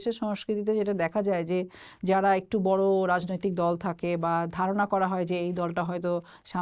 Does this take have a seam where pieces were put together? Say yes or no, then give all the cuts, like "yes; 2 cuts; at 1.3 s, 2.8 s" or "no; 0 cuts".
no; 0 cuts